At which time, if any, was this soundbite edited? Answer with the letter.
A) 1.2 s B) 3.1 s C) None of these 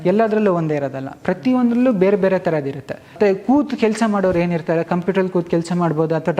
B